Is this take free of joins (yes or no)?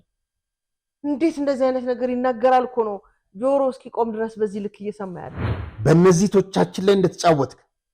no